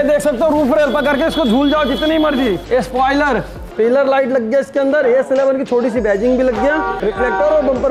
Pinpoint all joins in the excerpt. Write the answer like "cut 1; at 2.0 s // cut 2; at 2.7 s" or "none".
cut 1; at 2.6 s // cut 2; at 3.6 s // cut 3; at 6.9 s